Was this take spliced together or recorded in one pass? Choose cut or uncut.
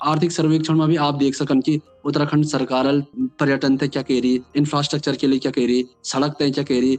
cut